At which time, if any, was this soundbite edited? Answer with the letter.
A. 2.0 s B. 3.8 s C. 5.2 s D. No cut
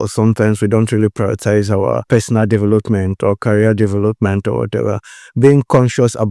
A